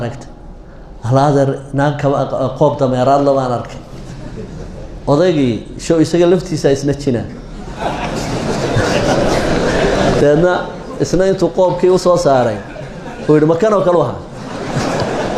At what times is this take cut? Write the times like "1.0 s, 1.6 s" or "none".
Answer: none